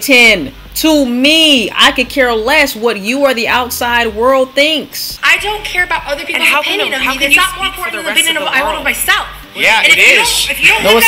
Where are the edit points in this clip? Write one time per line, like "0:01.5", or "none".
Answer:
0:05.0